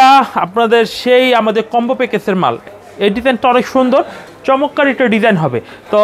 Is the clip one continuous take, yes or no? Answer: no